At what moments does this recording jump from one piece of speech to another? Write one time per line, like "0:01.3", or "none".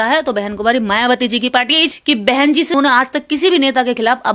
0:01.9
0:02.8